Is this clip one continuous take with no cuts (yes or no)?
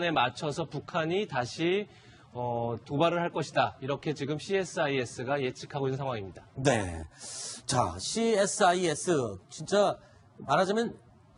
no